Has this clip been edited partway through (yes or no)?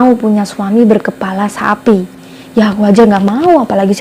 no